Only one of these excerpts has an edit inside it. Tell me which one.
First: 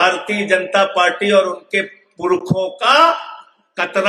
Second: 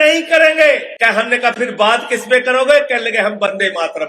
second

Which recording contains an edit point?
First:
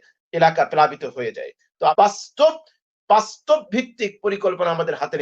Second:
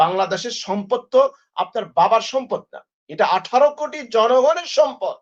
first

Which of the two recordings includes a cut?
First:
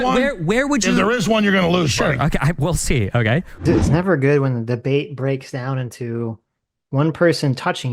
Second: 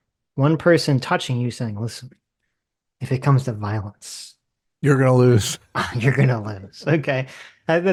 first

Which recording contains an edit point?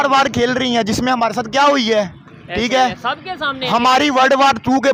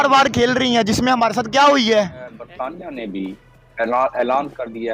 second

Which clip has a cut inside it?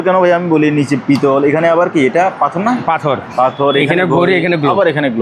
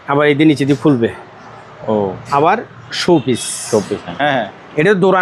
second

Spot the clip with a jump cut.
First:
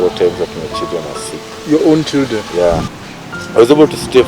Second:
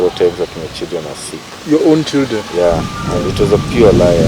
first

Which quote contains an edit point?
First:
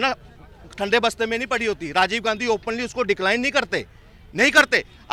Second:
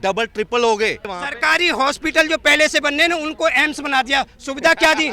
second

